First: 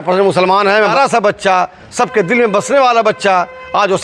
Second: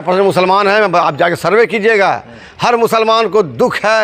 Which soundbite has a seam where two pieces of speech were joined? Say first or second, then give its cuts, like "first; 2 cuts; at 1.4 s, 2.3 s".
first; 1 cut; at 0.9 s